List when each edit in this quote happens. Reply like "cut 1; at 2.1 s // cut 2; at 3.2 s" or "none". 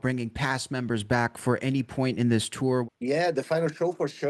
cut 1; at 2.8 s